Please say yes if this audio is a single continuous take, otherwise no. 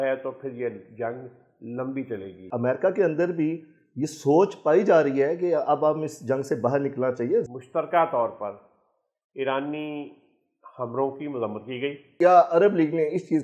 no